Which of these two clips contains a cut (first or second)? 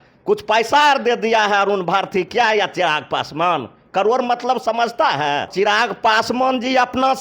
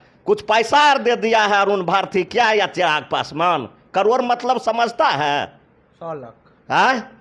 first